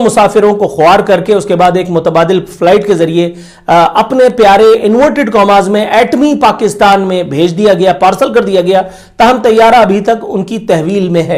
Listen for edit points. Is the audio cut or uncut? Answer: uncut